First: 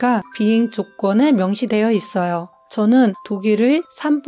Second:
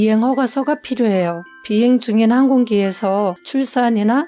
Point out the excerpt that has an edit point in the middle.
first; 1 cut; at 3.2 s

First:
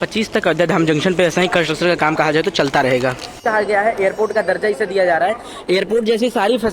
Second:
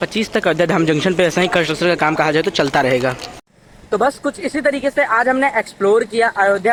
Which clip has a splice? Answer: first; 1 cut; at 3.4 s

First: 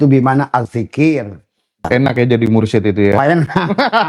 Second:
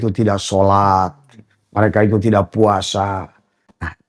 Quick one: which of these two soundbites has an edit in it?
first; 1 cut; at 1.9 s

